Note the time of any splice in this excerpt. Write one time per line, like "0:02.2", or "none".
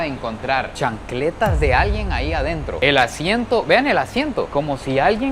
none